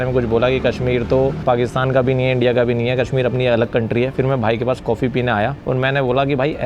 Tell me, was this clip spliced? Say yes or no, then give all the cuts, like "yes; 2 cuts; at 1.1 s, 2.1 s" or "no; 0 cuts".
yes; 2 cuts; at 1.4 s, 5.6 s